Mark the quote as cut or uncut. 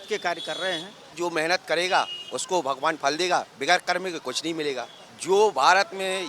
cut